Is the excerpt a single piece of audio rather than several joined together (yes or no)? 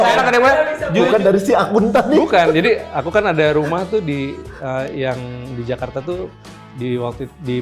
no